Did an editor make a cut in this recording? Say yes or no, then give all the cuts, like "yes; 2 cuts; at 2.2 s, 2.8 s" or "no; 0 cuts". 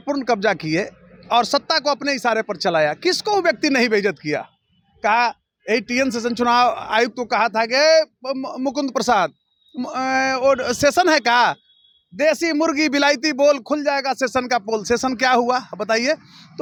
no; 0 cuts